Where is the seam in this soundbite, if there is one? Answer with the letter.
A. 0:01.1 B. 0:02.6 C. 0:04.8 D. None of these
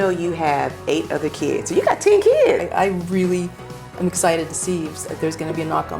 B